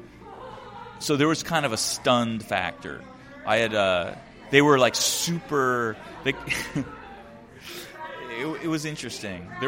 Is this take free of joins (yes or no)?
yes